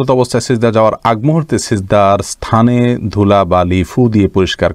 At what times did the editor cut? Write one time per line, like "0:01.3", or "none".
none